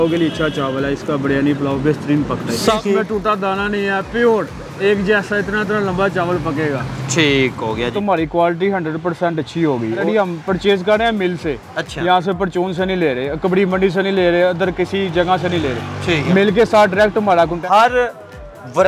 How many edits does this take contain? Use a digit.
4